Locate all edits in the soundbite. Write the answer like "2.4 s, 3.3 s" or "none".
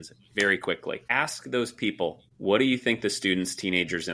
1.1 s, 2.3 s